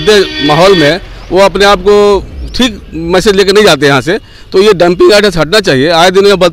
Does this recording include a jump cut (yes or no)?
no